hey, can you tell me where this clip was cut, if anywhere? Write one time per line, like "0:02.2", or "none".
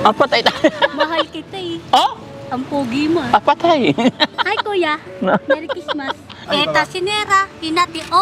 0:06.4